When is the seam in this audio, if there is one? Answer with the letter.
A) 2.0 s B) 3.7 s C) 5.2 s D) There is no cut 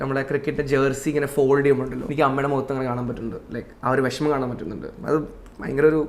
A